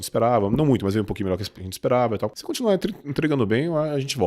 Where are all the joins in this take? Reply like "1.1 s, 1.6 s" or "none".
2.4 s